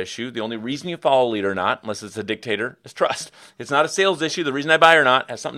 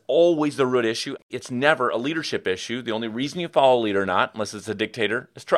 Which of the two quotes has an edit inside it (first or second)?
second